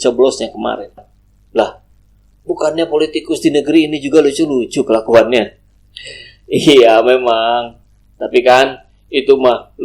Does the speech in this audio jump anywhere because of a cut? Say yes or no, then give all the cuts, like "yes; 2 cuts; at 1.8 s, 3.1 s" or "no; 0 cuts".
yes; 1 cut; at 1.0 s